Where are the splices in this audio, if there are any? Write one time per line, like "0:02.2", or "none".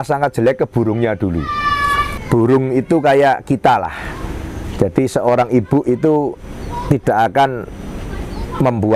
0:02.1